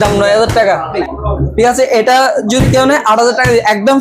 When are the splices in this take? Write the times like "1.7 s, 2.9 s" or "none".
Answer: 1.0 s